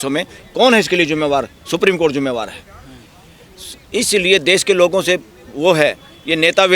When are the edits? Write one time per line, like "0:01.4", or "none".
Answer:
none